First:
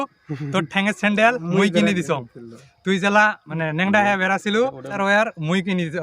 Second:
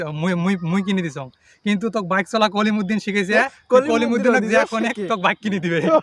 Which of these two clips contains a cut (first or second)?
first